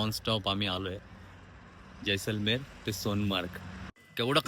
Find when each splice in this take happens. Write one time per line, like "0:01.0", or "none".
none